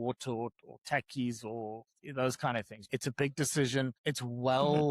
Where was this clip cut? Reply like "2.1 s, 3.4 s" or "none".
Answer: 2.7 s, 4.0 s